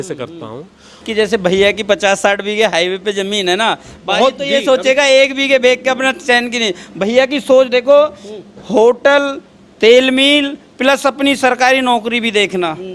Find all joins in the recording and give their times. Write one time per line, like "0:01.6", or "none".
0:01.0